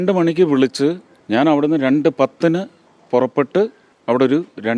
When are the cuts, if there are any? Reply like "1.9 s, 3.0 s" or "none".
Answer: 1.1 s, 3.9 s

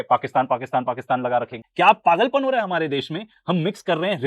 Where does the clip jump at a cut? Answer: 1.6 s

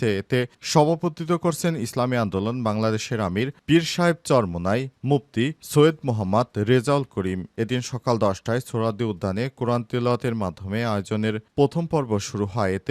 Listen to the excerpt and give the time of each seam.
none

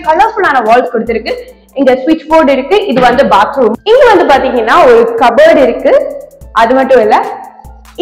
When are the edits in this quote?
3.8 s

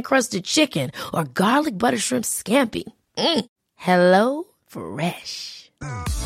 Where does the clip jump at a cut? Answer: none

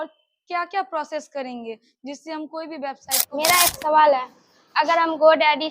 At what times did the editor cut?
3.3 s

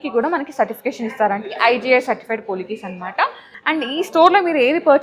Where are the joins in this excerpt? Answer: 3.4 s

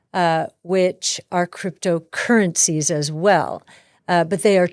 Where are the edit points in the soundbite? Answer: none

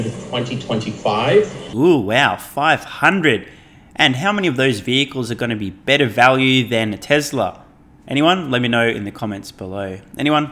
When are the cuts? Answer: none

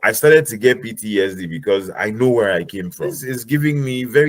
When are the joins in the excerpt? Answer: 3.3 s

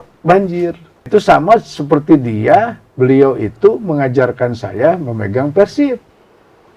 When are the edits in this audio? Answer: 1.0 s

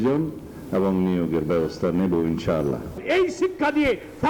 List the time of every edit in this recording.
3.0 s

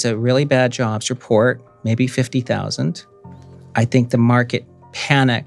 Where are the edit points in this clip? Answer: none

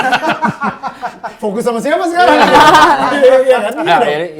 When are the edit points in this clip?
none

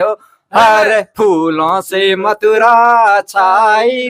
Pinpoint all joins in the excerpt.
none

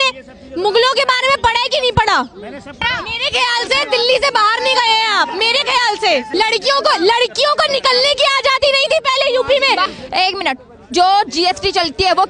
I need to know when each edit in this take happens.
2.9 s, 6.3 s, 9.9 s

